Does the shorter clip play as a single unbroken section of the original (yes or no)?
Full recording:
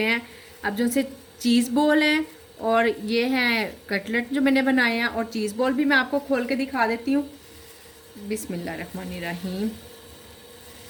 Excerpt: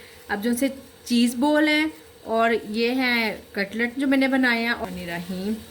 no